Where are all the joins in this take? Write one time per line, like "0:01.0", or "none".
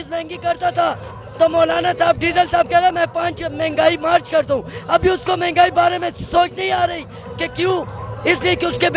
none